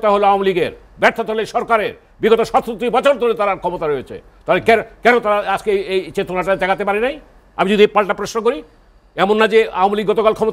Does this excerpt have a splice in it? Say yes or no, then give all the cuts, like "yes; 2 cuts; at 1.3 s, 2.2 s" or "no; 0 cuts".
no; 0 cuts